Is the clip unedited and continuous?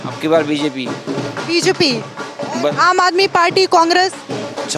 yes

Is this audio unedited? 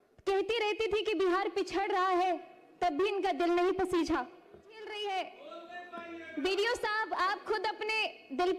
no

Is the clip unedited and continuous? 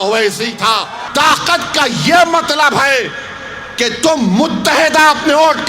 no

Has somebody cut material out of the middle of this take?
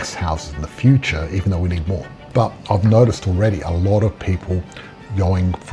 yes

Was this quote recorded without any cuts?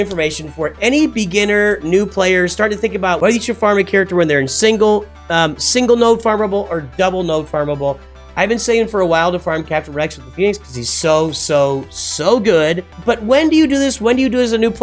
no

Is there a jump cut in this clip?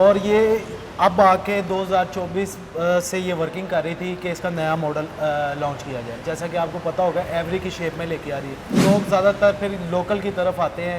yes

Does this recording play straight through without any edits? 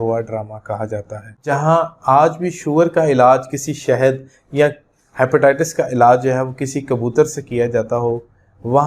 no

